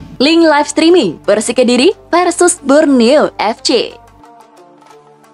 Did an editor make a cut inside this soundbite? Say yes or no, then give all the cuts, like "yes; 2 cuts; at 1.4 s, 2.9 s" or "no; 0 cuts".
yes; 1 cut; at 4.0 s